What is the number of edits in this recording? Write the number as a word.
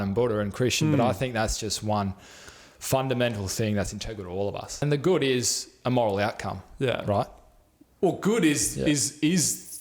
one